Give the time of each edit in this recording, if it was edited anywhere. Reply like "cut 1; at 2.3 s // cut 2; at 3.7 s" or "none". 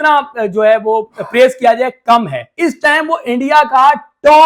cut 1; at 2.4 s

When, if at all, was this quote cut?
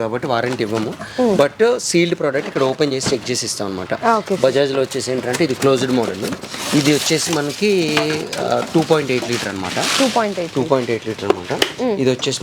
none

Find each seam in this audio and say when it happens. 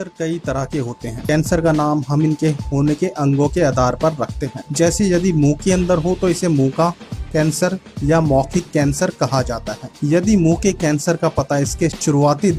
cut 1; at 1.3 s

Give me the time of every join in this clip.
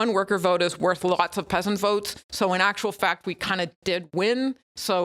none

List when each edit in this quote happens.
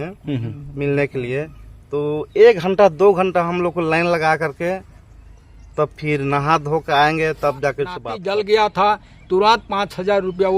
cut 1; at 8.1 s

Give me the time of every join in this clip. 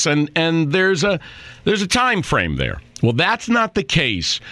none

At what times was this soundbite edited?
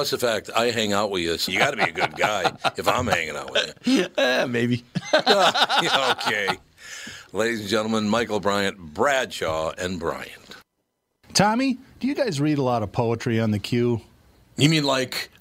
cut 1; at 11.2 s

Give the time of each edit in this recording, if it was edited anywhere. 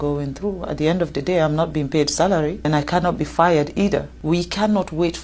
cut 1; at 2.7 s // cut 2; at 4.1 s

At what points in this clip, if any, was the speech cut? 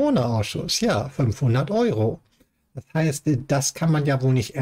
none

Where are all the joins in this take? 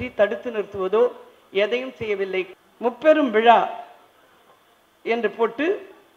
cut 1; at 2.6 s

